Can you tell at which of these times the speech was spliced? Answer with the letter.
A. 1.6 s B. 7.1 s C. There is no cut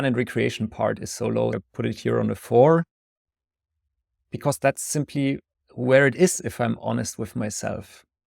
A